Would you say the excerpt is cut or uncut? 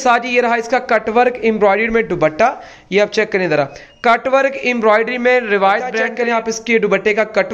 cut